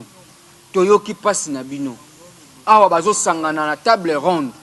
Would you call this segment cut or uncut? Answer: uncut